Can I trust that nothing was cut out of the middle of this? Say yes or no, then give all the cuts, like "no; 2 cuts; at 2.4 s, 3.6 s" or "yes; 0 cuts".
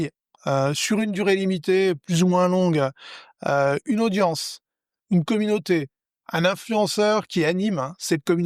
yes; 0 cuts